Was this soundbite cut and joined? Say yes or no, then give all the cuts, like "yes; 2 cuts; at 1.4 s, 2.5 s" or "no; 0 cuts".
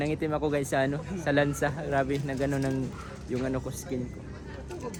no; 0 cuts